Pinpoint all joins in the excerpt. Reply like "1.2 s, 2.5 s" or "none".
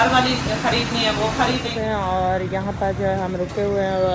1.7 s

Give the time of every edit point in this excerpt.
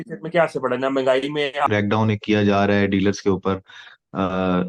1.7 s

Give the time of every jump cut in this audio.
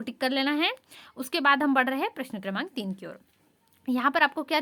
none

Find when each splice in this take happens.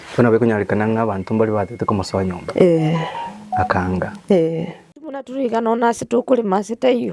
5.3 s

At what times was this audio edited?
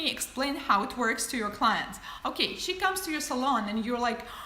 2.2 s

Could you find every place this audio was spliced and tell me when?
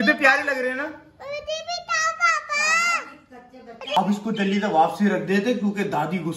4.0 s

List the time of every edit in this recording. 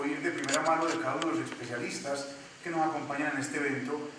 1.7 s

